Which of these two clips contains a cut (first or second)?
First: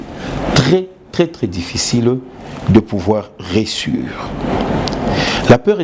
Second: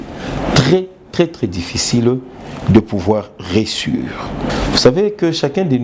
second